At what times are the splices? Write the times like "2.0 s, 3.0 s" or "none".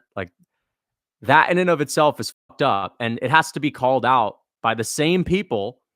none